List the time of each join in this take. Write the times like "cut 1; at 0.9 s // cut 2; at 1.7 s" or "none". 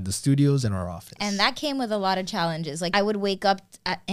cut 1; at 2.9 s